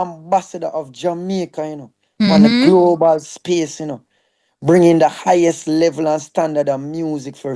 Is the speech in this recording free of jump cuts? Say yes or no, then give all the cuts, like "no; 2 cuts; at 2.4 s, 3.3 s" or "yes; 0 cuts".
yes; 0 cuts